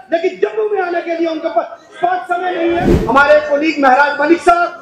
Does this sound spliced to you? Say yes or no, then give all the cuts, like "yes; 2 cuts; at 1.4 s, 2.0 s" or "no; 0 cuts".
yes; 1 cut; at 2.9 s